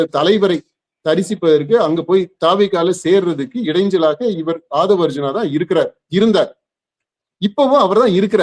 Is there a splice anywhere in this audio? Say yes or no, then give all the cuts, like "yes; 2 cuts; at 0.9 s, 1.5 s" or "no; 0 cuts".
no; 0 cuts